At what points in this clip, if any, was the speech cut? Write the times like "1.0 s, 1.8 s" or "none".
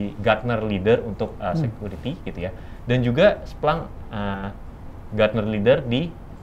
none